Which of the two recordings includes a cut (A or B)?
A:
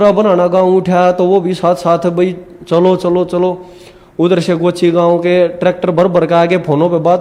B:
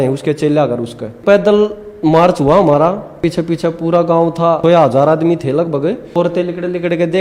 B